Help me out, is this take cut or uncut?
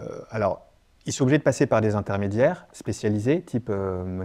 uncut